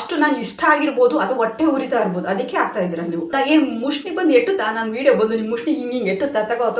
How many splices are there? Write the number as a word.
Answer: one